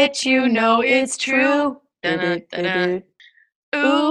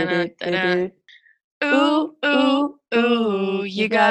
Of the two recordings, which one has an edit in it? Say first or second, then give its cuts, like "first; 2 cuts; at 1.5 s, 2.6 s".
first; 1 cut; at 0.9 s